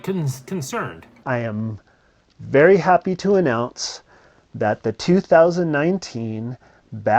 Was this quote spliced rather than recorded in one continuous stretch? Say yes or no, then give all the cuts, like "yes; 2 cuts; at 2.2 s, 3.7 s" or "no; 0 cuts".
yes; 1 cut; at 1.2 s